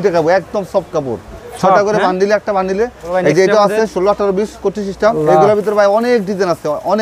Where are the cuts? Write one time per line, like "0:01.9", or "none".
0:03.0
0:05.2